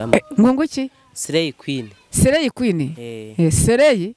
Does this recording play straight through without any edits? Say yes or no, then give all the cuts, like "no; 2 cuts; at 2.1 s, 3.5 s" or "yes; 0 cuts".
yes; 0 cuts